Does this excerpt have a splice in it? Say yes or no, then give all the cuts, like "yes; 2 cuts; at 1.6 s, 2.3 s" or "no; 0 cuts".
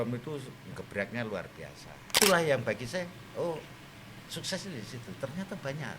yes; 1 cut; at 2.1 s